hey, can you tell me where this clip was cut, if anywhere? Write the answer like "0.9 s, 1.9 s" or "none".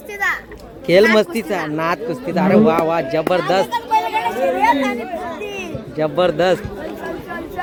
none